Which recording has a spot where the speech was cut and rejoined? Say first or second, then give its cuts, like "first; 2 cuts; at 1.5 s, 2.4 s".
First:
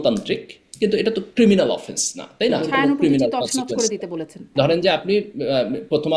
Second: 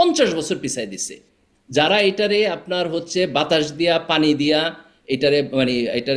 first; 2 cuts; at 2.6 s, 4.5 s